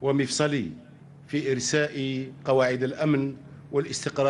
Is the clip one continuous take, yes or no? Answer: yes